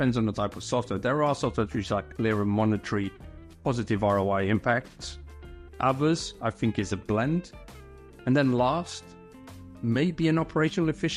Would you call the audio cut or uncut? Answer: uncut